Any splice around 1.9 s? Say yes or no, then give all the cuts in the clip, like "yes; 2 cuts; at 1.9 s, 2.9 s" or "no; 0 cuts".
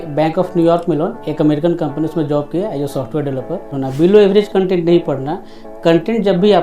no; 1 cut; at 3.8 s